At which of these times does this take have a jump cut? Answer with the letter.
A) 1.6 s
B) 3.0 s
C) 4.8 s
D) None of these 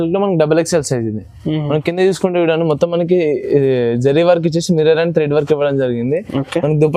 D